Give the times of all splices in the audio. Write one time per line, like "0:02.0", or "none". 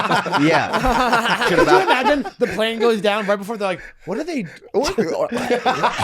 0:01.5